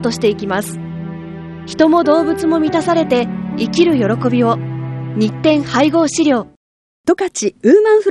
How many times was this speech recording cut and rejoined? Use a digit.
0